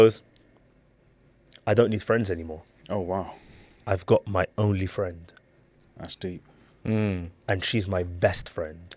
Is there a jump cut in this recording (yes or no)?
no